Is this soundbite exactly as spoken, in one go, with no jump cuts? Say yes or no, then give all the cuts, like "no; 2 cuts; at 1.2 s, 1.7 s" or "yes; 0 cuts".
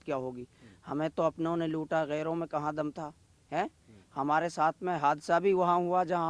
yes; 0 cuts